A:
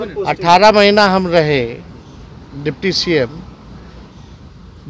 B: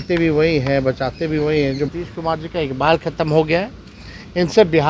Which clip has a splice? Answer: B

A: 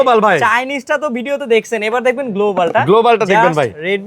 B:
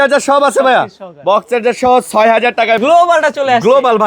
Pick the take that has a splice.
B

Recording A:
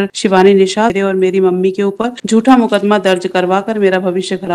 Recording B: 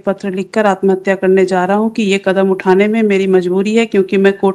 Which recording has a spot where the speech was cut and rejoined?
A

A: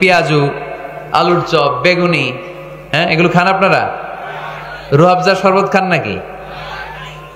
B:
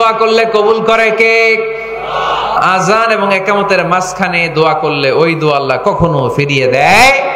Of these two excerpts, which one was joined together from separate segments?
B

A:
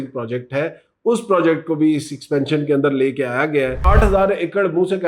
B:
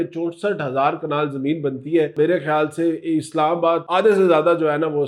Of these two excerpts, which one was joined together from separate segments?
A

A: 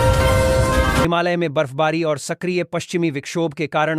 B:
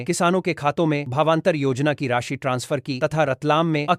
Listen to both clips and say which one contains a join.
A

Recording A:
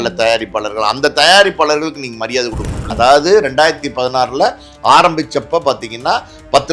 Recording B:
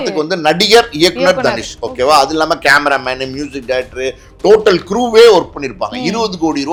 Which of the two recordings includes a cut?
A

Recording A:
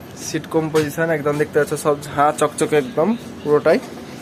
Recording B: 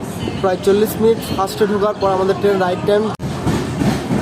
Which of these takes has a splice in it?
B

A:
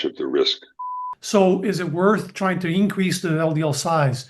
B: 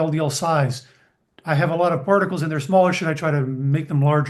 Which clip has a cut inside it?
A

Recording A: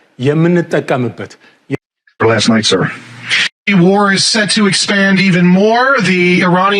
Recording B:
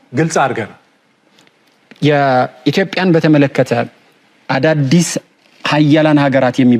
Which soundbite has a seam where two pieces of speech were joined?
A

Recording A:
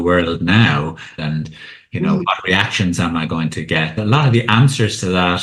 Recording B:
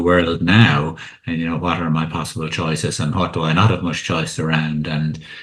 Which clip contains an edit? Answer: A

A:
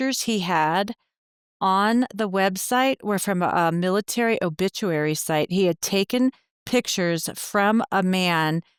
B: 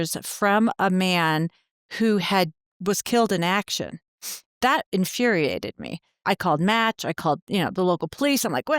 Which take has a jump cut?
B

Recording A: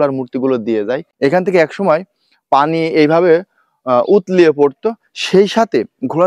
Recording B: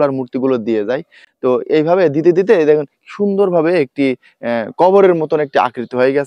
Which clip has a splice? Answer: A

